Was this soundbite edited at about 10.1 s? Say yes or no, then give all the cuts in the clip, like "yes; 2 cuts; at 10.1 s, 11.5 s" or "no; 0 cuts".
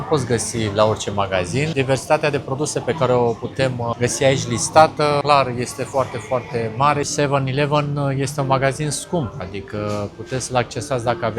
no; 4 cuts; at 1.7 s, 3.9 s, 5.4 s, 7.1 s